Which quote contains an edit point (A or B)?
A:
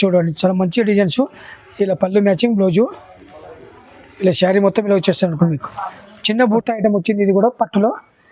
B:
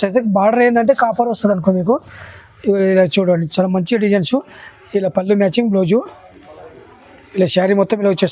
A